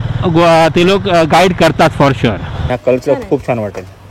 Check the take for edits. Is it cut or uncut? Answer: cut